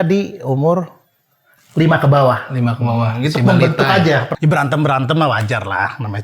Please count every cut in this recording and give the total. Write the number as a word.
one